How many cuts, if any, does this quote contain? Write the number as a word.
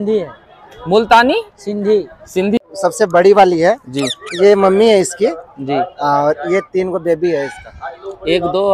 one